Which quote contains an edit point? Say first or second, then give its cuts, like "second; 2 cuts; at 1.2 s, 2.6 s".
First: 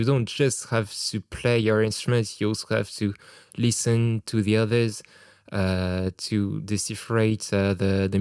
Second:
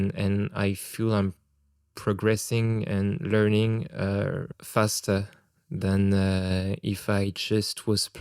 second; 1 cut; at 4.5 s